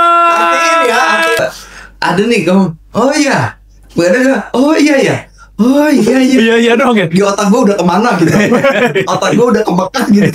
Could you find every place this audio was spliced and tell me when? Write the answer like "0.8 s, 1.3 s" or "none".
1.4 s